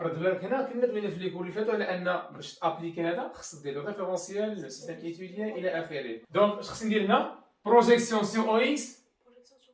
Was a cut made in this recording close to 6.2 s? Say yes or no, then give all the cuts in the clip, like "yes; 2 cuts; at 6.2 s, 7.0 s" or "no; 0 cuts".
yes; 1 cut; at 6.2 s